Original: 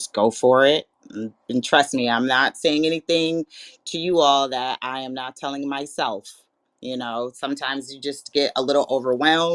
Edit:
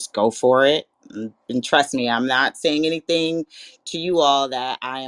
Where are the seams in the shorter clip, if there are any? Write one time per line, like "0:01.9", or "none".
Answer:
none